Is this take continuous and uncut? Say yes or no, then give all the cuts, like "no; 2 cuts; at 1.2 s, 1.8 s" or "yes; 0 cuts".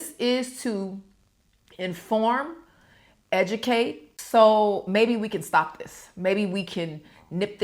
no; 1 cut; at 4.1 s